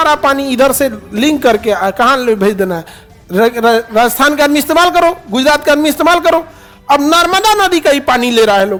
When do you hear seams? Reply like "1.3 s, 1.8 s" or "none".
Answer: none